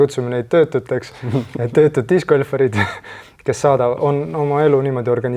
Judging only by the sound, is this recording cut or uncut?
uncut